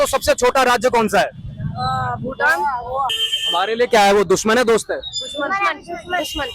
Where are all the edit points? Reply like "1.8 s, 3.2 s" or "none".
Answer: 3.2 s

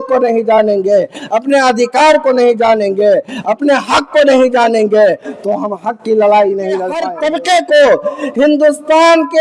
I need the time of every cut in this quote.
7.1 s

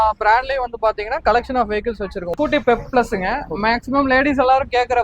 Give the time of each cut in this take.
2.3 s

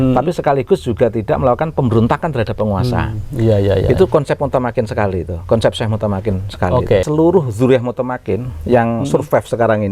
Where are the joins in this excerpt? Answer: 7.0 s

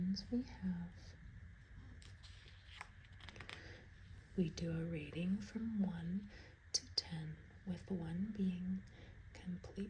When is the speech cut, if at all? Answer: none

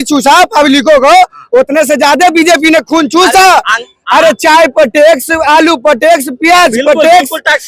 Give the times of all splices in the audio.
none

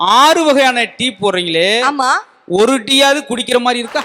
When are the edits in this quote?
none

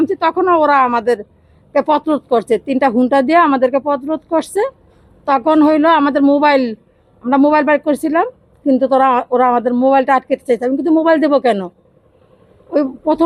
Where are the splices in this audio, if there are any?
none

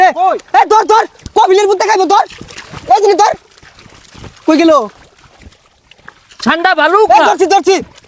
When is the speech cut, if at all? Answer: none

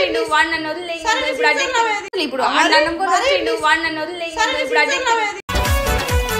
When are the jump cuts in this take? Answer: 2.1 s, 5.3 s

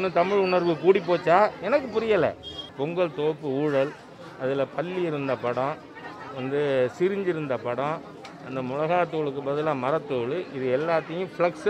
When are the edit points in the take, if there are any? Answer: 2.7 s

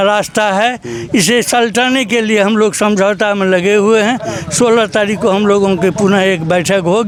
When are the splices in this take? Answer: none

